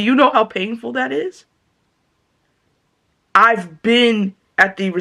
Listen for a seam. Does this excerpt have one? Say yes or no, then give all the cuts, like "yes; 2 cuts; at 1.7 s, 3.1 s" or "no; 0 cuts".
no; 0 cuts